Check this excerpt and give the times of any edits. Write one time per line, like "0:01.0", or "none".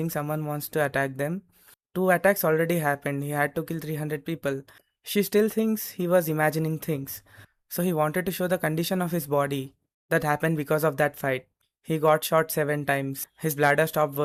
none